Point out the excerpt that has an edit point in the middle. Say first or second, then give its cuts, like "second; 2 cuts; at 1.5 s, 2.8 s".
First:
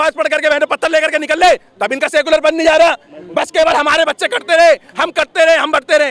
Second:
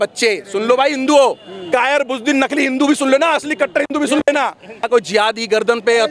second; 1 cut; at 4.9 s